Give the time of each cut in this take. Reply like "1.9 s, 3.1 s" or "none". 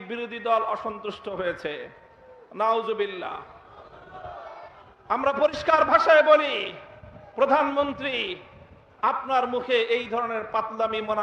none

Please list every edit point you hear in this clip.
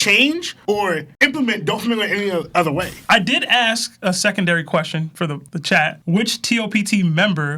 2.9 s

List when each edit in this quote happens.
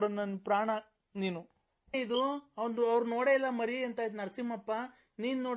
2.0 s

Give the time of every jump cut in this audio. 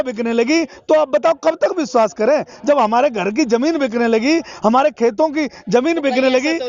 none

